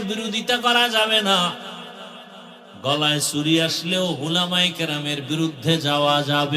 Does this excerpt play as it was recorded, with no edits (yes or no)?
yes